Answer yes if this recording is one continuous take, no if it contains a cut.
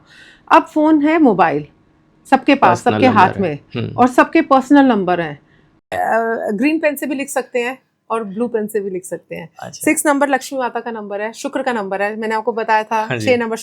no